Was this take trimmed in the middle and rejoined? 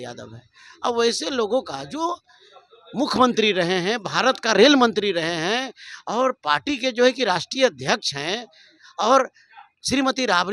no; 0 cuts

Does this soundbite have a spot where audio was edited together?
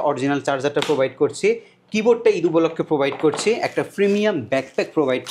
no; 0 cuts

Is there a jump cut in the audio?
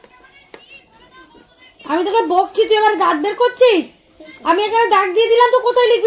no; 0 cuts

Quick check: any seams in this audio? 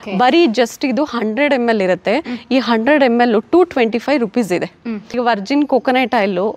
yes; 1 cut; at 4.9 s

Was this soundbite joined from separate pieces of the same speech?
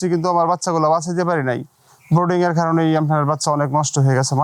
no; 0 cuts

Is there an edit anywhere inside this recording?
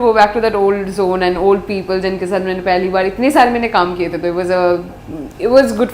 no; 0 cuts

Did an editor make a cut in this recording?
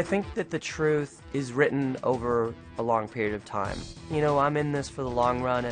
yes; 1 cut; at 1.2 s

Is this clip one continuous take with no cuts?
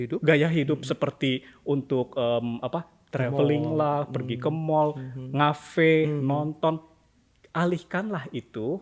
yes; 0 cuts

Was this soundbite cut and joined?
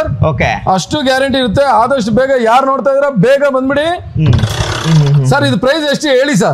yes; 1 cut; at 4.8 s

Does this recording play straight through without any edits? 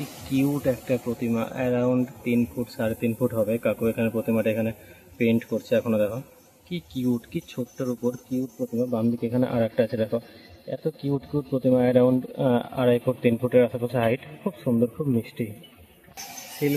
yes; 0 cuts

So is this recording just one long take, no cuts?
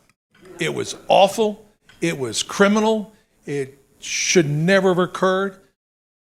yes; 0 cuts

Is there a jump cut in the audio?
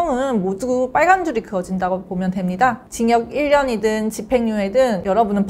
no; 0 cuts

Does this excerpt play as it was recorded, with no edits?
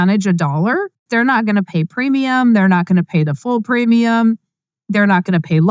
no; 1 cut; at 1.1 s

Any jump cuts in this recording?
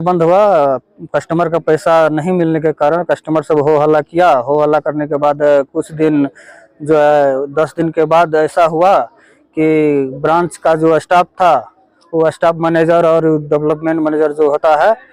no; 0 cuts

